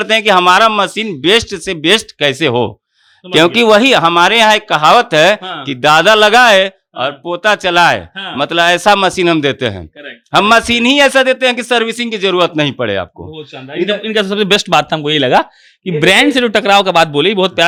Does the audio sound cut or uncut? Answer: uncut